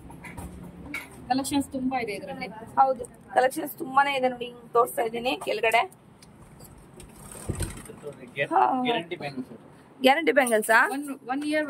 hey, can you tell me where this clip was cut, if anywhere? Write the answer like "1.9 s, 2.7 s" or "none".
none